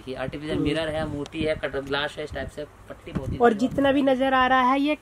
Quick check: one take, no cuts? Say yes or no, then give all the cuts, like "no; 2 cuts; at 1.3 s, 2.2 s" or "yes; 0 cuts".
yes; 0 cuts